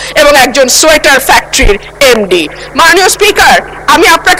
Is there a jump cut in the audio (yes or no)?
no